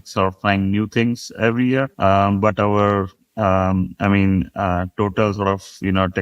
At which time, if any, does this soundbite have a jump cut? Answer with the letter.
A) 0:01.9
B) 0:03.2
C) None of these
A